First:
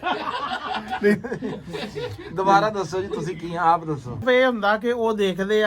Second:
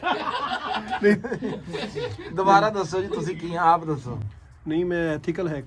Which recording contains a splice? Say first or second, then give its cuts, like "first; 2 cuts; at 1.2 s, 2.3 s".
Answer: first; 1 cut; at 4.2 s